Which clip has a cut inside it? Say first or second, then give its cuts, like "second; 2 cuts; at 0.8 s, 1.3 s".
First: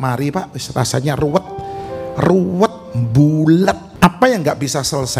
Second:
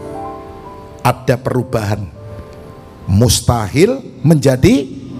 first; 1 cut; at 3.9 s